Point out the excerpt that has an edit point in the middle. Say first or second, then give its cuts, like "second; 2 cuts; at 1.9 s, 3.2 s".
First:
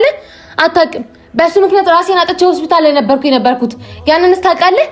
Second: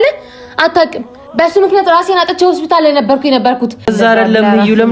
second; 1 cut; at 3.9 s